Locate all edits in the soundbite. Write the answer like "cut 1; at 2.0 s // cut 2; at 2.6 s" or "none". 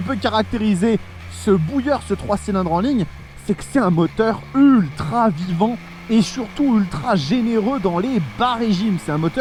none